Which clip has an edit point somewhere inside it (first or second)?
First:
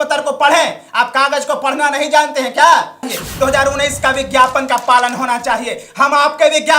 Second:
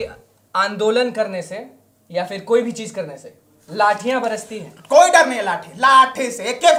first